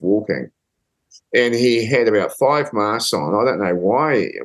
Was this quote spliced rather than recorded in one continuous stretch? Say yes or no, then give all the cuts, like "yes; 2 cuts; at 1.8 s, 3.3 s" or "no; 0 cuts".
no; 0 cuts